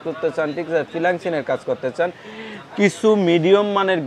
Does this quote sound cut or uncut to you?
uncut